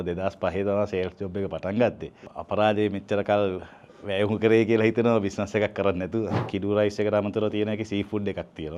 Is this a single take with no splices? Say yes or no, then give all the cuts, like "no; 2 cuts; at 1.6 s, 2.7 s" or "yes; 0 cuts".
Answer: no; 1 cut; at 6.5 s